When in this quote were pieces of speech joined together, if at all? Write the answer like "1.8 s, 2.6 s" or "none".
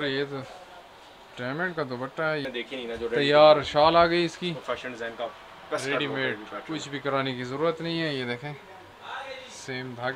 2.5 s